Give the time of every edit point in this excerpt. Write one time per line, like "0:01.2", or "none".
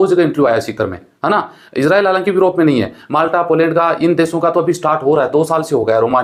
none